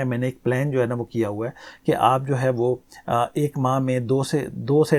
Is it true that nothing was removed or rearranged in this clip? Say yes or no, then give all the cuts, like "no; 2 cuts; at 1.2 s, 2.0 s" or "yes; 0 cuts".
yes; 0 cuts